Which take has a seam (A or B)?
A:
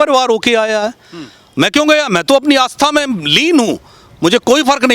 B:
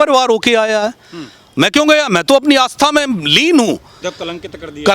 B